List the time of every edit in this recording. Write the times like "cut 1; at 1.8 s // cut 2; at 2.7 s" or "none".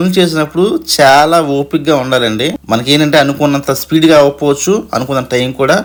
none